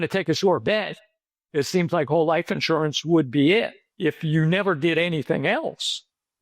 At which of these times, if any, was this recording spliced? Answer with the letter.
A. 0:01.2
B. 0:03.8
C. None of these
B